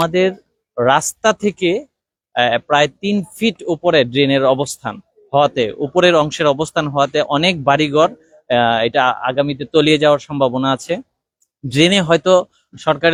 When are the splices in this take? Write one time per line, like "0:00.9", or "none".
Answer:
none